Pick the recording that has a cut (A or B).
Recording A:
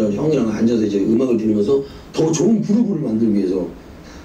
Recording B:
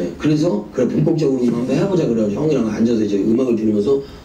B